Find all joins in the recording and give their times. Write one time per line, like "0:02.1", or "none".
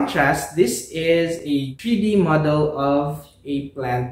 0:01.5